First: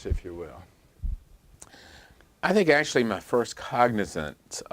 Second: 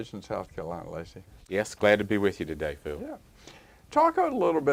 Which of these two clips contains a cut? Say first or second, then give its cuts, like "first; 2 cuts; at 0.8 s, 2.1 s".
first; 1 cut; at 2.7 s